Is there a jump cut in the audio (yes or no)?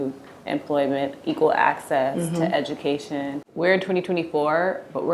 yes